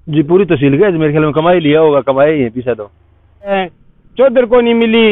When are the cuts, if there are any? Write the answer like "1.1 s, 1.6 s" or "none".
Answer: 3.5 s